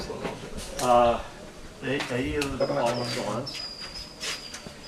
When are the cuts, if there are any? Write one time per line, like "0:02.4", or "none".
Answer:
none